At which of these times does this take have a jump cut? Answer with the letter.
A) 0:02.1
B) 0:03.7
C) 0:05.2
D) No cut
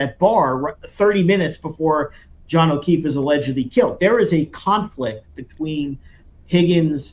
D